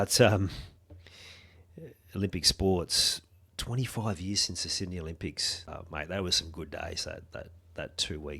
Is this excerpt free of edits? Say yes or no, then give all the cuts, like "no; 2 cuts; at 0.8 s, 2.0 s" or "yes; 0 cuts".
no; 1 cut; at 5.7 s